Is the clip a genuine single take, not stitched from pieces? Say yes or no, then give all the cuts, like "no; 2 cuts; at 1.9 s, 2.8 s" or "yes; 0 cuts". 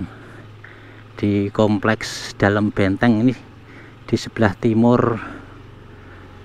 yes; 0 cuts